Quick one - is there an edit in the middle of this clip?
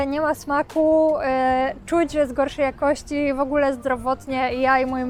no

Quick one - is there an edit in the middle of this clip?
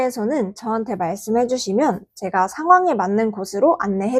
no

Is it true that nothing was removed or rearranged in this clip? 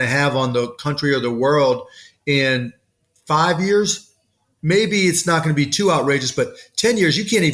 yes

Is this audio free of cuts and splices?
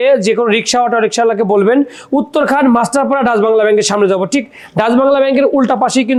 yes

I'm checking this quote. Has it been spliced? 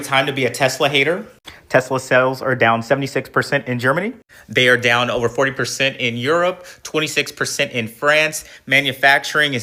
no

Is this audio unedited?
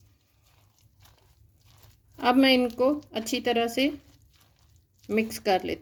yes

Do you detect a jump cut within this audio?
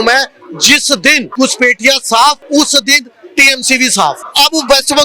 yes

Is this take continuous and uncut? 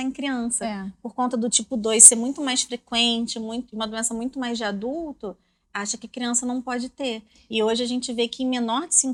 yes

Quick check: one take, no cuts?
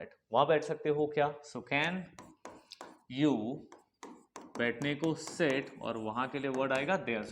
yes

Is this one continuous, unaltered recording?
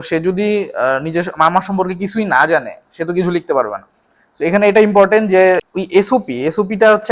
no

